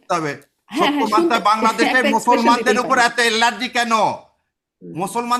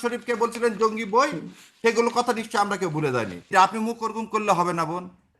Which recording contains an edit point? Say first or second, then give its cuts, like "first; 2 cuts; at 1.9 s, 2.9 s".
second; 1 cut; at 3.5 s